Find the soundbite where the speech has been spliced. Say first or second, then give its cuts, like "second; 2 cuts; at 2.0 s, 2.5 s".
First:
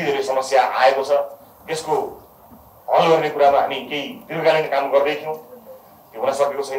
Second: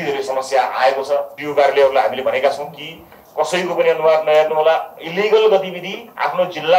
second; 1 cut; at 1.4 s